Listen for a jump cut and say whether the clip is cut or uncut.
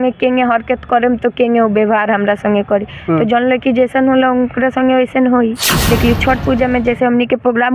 cut